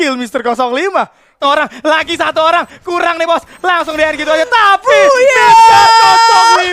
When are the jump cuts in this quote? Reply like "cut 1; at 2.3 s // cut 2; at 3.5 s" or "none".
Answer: cut 1; at 1.4 s